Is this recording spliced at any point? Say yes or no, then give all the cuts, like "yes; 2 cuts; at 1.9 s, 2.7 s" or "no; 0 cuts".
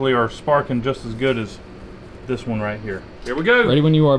yes; 1 cut; at 3.1 s